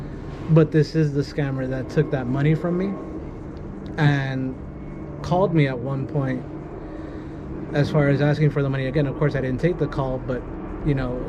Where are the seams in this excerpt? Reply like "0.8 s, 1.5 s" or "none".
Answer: none